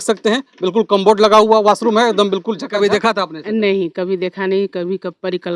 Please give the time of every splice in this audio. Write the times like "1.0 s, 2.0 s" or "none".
2.7 s